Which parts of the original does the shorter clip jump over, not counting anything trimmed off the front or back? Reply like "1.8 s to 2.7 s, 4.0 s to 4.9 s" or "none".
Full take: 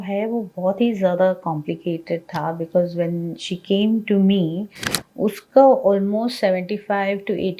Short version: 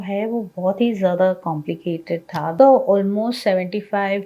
2.5 s to 5.4 s